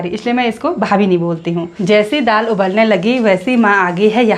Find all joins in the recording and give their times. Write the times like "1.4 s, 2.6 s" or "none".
1.7 s